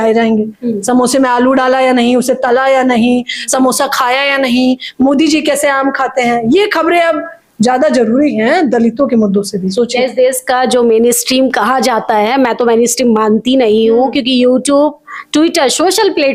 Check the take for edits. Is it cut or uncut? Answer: uncut